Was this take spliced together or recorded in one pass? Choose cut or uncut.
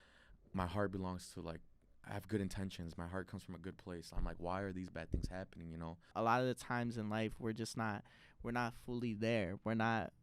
cut